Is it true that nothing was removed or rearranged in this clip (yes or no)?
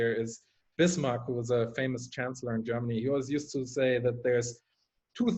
yes